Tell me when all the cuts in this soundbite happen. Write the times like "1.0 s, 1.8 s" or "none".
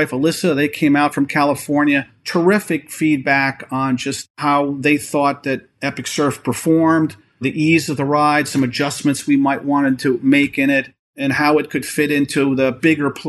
none